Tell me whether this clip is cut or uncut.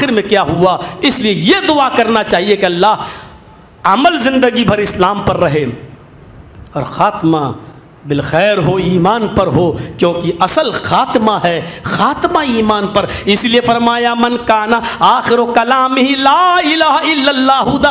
uncut